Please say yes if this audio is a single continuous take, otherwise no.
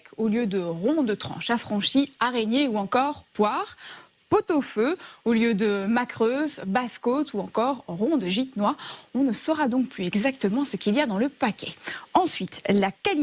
yes